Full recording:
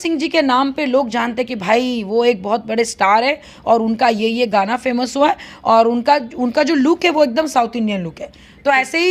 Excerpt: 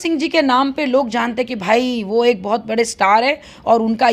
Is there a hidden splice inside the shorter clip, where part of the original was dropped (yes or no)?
no